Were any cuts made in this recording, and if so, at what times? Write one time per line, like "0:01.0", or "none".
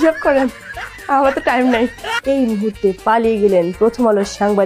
0:02.1